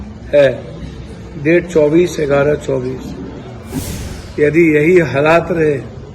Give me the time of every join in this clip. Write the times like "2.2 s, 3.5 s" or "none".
3.8 s